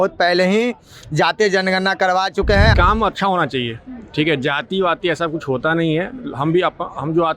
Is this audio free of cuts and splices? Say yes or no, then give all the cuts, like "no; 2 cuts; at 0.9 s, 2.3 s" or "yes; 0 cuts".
no; 1 cut; at 2.7 s